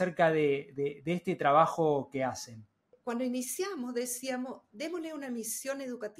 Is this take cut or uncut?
cut